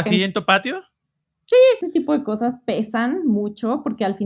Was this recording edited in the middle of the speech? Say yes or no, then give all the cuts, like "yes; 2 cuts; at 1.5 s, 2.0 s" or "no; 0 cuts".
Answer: yes; 1 cut; at 1.8 s